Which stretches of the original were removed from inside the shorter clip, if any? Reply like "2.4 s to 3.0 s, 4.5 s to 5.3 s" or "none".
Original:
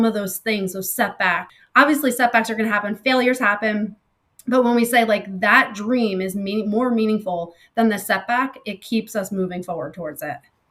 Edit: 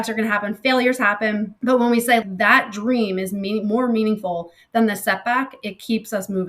3.9 s to 4.4 s, 5.1 s to 5.3 s